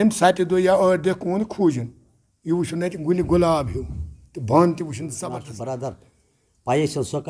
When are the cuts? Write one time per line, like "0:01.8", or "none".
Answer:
0:05.3